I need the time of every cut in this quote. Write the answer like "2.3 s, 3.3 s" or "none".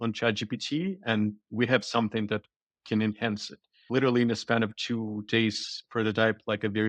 3.9 s